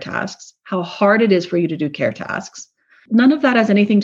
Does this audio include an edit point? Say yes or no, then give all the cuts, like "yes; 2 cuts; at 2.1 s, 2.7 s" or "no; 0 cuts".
yes; 1 cut; at 3.0 s